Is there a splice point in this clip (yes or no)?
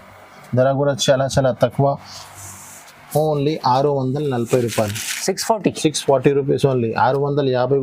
no